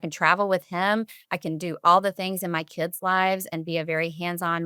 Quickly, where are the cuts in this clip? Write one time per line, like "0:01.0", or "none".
none